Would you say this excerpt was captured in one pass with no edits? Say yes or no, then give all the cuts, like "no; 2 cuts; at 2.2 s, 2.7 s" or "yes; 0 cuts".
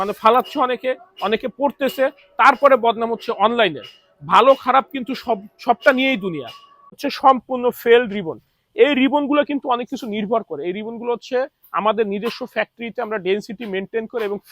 no; 1 cut; at 7.0 s